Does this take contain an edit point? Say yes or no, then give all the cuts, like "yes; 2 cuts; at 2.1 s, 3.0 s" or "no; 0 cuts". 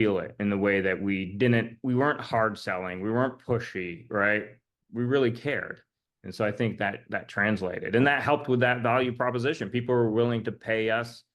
no; 0 cuts